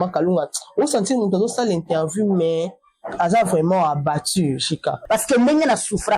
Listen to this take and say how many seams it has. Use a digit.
1